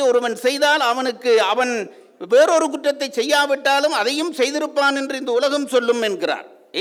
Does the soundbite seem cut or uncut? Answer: uncut